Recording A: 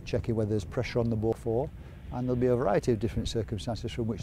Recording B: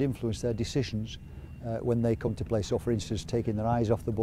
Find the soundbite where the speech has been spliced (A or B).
A